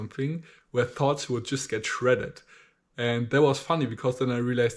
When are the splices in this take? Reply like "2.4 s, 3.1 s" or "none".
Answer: none